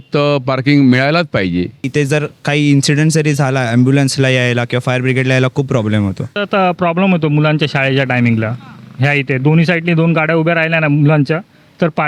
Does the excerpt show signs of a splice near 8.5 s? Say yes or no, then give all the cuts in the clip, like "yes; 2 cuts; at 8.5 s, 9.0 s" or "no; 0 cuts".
no; 2 cuts; at 1.9 s, 6.4 s